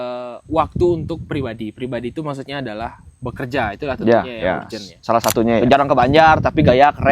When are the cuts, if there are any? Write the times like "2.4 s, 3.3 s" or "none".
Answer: 5.6 s